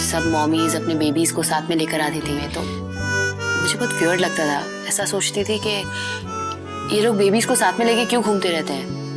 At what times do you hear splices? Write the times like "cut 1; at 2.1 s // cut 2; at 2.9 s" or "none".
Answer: cut 1; at 2.5 s